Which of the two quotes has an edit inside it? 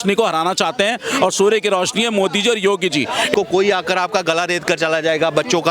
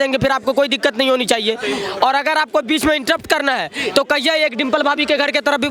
first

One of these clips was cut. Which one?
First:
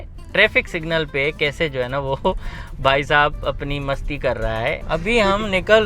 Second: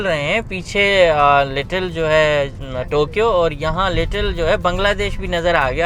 first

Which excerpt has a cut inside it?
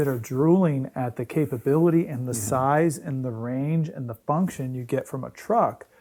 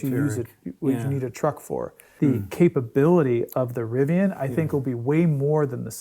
second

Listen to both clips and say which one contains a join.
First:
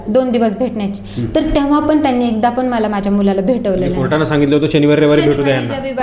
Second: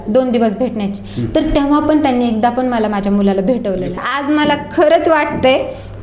second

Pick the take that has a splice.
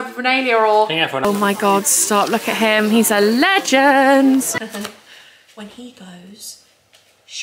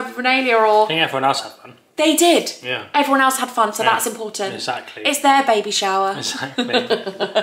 first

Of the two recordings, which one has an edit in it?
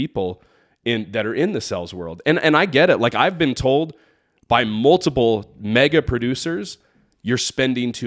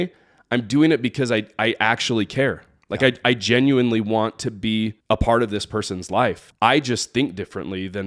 second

